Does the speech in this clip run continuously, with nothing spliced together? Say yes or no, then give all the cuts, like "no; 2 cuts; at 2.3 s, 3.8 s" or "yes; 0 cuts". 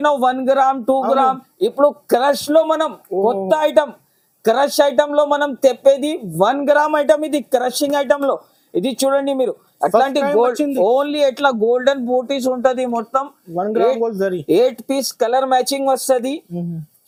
yes; 0 cuts